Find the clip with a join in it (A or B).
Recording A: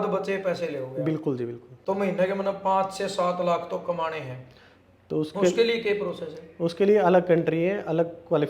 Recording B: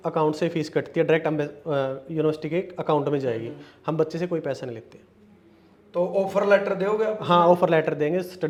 A